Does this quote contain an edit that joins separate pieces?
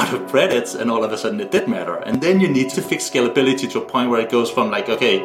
yes; 1 cut; at 2.7 s

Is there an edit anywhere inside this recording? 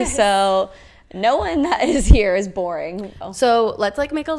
yes; 1 cut; at 3.2 s

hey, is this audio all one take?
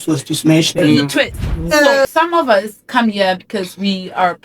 no; 1 cut; at 2.0 s

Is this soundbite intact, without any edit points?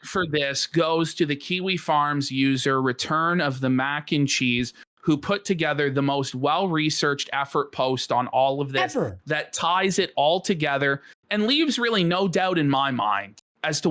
yes; 0 cuts

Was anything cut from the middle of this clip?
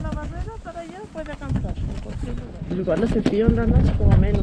yes; 1 cut; at 2.5 s

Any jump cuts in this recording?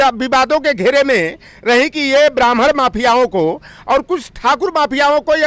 no; 0 cuts

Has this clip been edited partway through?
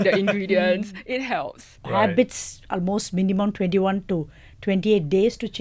yes; 1 cut; at 1.7 s

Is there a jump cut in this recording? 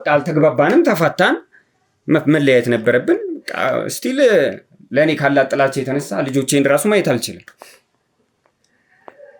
no; 0 cuts

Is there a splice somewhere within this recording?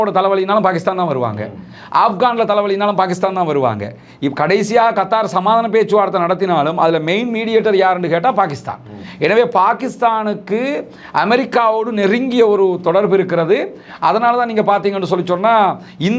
no; 0 cuts

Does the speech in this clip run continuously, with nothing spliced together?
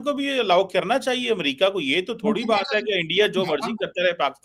yes; 0 cuts

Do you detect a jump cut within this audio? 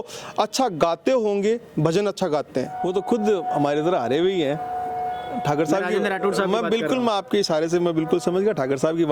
yes; 1 cut; at 2.8 s

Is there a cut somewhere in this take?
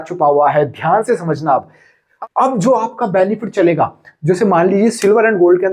yes; 1 cut; at 2.0 s

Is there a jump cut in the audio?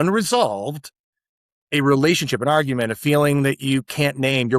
no; 0 cuts

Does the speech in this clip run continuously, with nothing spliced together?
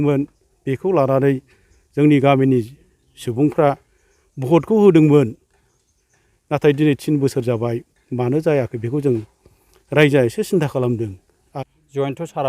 no; 1 cut; at 11.6 s

